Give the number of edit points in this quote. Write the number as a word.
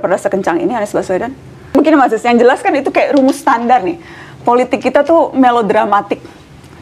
one